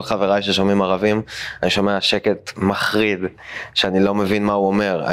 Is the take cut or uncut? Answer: uncut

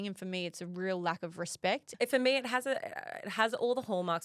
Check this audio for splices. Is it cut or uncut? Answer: cut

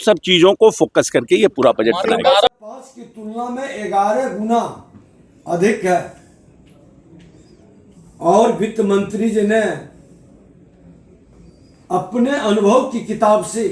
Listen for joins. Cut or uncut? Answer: cut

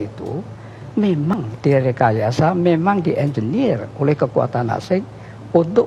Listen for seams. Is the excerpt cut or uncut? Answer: cut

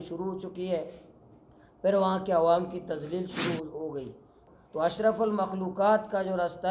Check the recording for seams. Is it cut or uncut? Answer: cut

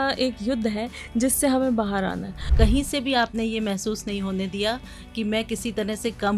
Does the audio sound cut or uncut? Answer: cut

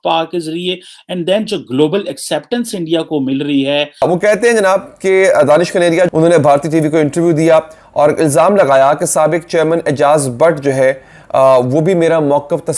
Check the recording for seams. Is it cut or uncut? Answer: cut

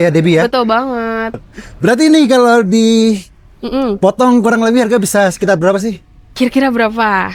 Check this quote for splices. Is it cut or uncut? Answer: uncut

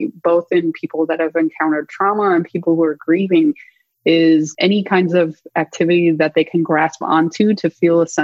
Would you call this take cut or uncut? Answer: cut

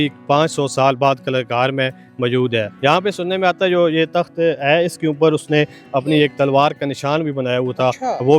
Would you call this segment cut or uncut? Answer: cut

